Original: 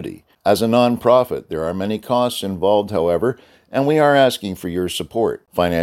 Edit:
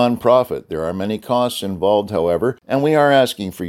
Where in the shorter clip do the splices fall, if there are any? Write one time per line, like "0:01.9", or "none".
0:02.6